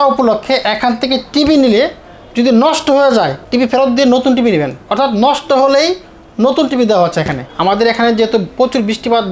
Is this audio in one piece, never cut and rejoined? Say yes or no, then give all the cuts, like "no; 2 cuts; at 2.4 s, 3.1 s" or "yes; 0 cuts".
no; 2 cuts; at 3.4 s, 7.5 s